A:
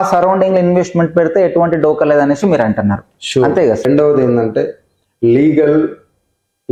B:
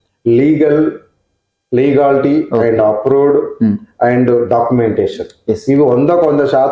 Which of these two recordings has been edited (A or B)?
A